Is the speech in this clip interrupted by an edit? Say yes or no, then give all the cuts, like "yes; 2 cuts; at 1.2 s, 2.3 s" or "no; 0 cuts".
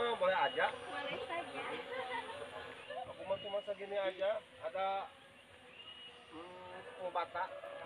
yes; 1 cut; at 2.8 s